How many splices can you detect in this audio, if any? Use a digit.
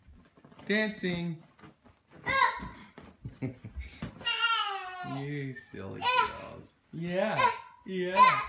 1